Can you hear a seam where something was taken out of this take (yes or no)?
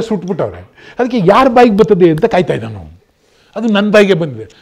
no